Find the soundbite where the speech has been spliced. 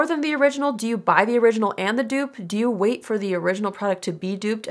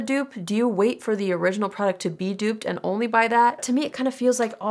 second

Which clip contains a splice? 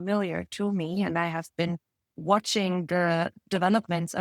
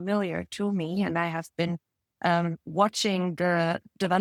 first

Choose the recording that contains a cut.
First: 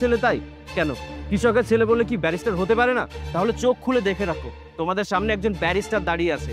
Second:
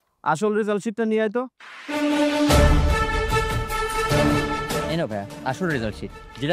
first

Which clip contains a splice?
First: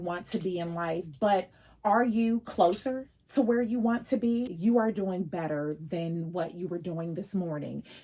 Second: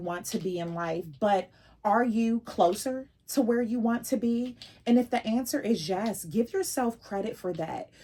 first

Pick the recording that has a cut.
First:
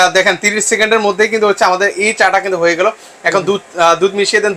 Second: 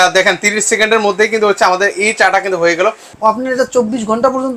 second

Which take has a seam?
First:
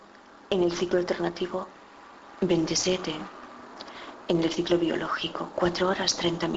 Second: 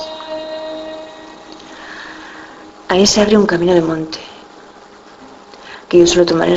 second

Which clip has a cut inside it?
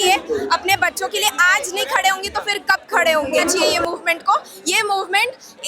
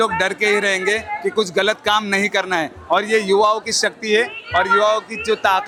first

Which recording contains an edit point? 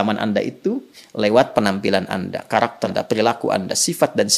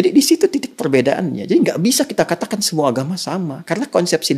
first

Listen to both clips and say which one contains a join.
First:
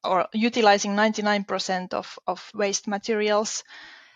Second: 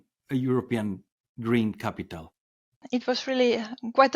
second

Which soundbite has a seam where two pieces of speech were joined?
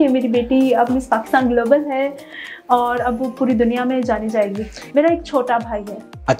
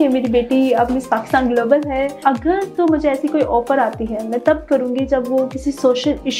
second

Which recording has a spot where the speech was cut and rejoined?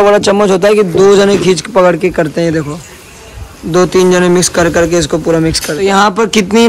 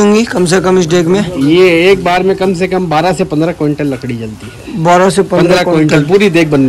first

